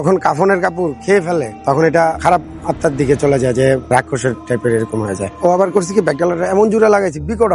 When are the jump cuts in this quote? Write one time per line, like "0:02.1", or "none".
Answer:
none